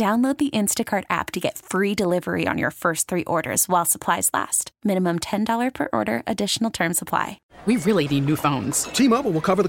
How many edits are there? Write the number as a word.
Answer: one